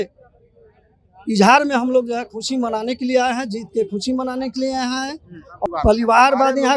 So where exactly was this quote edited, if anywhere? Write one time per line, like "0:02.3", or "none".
0:05.7